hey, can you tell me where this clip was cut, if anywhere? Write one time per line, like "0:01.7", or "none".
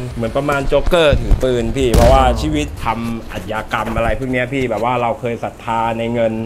0:02.8